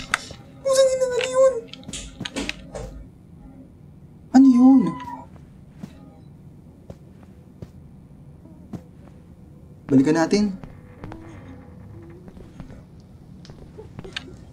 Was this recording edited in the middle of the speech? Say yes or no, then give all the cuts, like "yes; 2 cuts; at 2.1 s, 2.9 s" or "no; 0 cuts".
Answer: no; 0 cuts